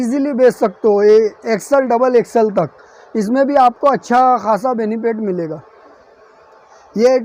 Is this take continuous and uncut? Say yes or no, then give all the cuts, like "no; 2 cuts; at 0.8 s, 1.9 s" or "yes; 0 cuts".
yes; 0 cuts